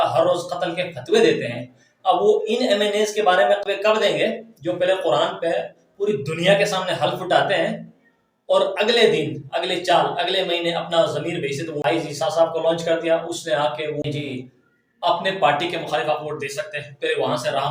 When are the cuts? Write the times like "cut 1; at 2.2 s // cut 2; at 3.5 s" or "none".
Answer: cut 1; at 3.6 s // cut 2; at 11.8 s // cut 3; at 14.0 s